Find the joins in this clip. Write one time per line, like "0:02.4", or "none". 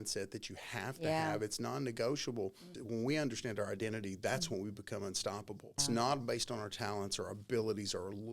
0:02.7
0:05.8